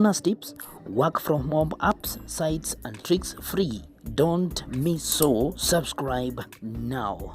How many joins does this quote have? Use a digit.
1